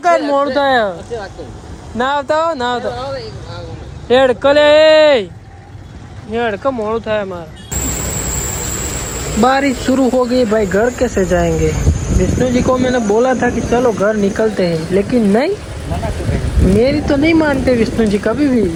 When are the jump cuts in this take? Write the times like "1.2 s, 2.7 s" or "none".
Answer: none